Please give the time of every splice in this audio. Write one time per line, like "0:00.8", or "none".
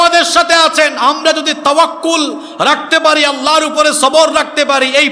none